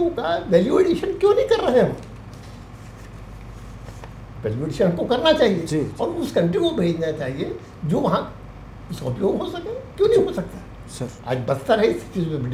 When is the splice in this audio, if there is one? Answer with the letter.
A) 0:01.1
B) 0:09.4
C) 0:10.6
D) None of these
D